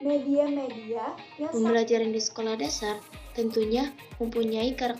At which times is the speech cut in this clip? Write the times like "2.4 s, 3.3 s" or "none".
1.5 s